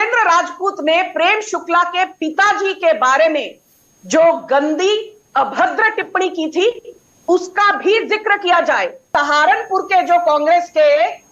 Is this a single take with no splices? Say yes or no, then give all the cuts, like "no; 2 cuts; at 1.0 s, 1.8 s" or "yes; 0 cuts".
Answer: no; 1 cut; at 9.0 s